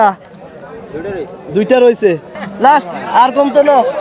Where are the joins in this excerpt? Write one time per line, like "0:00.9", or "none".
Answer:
0:02.3

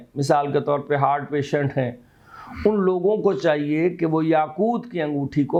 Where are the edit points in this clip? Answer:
none

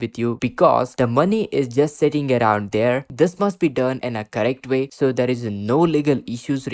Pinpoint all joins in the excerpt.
0:00.9
0:03.0

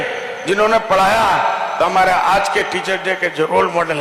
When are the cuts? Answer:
none

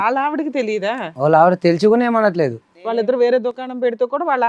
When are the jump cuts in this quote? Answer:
0:03.0

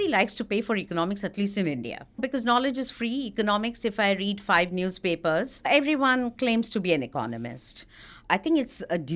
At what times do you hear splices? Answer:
0:02.2
0:05.7
0:08.2

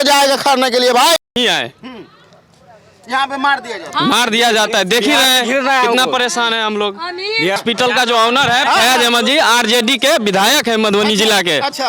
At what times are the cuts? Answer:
0:01.4
0:07.6

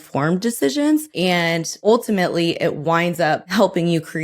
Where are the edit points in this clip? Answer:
0:01.5
0:03.5

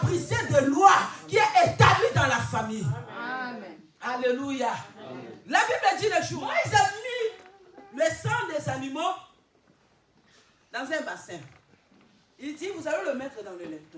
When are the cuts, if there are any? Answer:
0:06.4

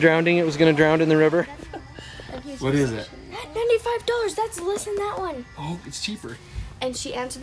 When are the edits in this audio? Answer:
0:01.5
0:06.4

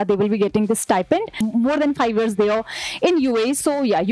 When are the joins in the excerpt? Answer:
0:01.4

